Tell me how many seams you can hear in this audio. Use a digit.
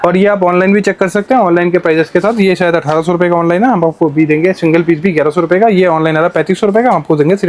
0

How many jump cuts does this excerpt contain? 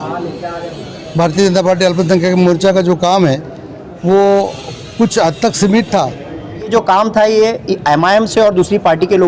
1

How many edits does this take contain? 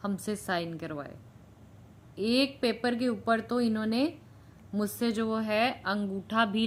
0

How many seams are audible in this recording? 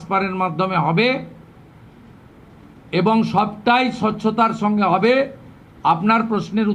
0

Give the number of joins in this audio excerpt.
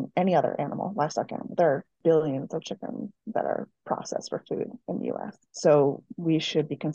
2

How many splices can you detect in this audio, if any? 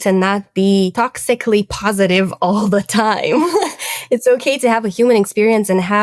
1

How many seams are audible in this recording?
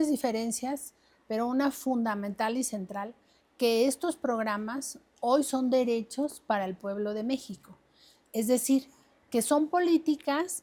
0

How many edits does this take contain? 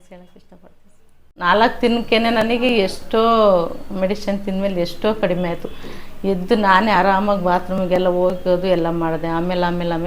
1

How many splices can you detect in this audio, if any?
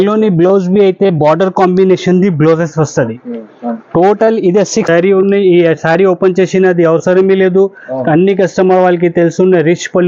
1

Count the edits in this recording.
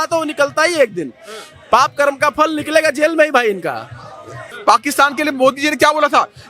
1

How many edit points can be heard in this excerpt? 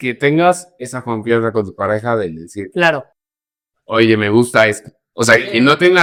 0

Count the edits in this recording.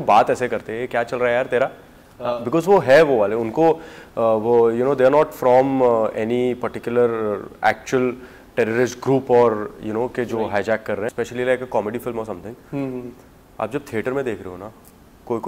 1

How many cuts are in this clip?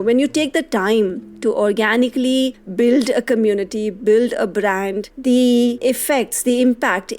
4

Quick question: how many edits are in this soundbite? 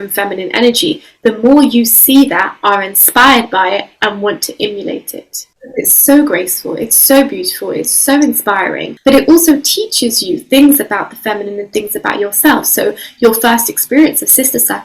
2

